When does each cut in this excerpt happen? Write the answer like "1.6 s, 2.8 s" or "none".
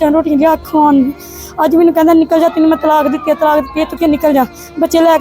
3.9 s

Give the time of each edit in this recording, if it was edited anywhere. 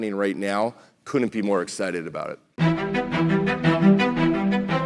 2.5 s

